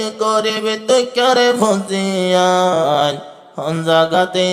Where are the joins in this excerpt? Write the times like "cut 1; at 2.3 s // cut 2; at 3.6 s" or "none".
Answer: none